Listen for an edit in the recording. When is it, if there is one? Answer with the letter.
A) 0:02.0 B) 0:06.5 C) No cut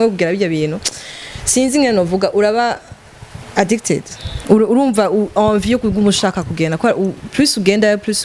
C